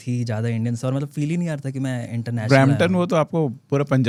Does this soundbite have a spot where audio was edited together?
no; 0 cuts

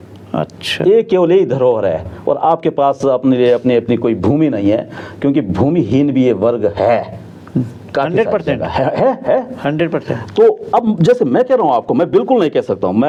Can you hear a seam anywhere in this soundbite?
no; 0 cuts

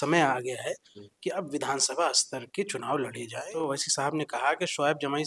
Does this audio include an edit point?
yes; 1 cut; at 3.6 s

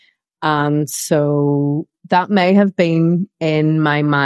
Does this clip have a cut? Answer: yes; 1 cut; at 2.0 s

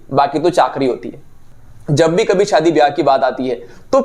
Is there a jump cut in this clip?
yes; 1 cut; at 1.3 s

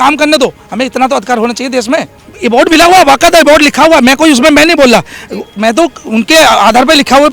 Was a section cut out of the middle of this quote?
yes; 1 cut; at 2.2 s

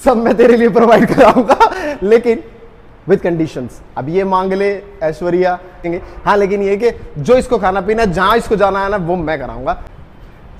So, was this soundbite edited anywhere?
no; 0 cuts

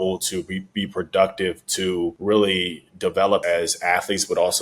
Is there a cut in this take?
yes; 2 cuts; at 2.2 s, 3.4 s

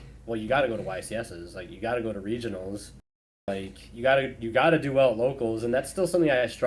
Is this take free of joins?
yes; 0 cuts

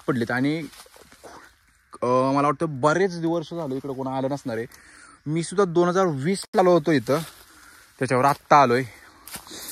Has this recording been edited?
no; 0 cuts

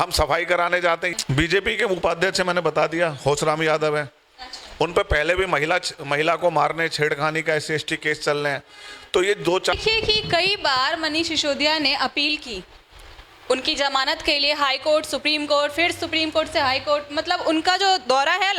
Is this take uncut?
no; 2 cuts; at 1.1 s, 9.7 s

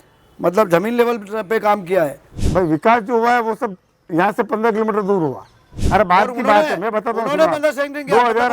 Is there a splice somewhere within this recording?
yes; 2 cuts; at 2.4 s, 5.8 s

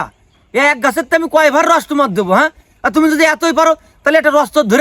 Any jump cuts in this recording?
no; 0 cuts

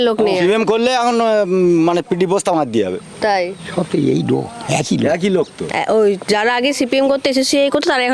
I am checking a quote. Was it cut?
no; 0 cuts

